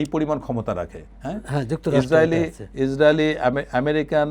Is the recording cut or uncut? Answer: uncut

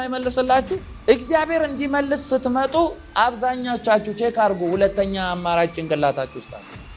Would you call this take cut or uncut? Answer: uncut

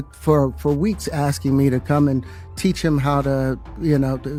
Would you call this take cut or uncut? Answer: uncut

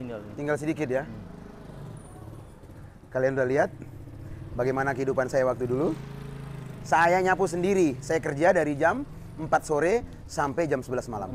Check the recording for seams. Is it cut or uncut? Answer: uncut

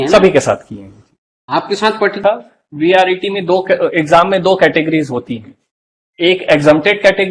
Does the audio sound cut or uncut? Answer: cut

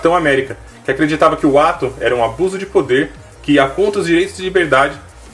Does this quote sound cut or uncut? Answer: uncut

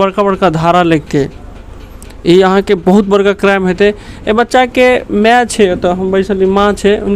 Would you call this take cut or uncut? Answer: uncut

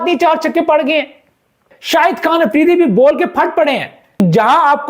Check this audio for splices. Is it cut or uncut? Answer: cut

